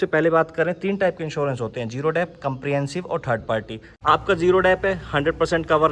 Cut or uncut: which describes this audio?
uncut